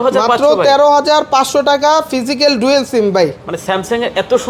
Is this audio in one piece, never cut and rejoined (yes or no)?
yes